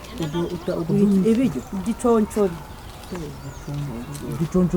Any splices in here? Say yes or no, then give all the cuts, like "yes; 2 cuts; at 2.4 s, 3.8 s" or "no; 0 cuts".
no; 0 cuts